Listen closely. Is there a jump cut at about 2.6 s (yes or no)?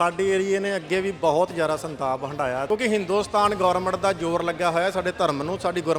yes